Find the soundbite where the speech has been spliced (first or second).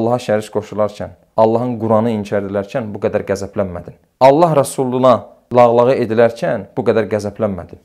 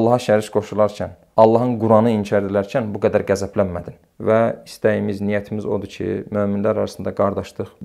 second